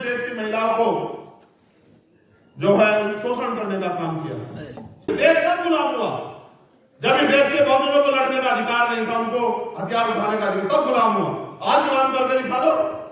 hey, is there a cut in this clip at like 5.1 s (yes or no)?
yes